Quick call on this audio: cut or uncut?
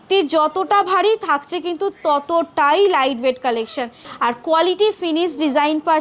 cut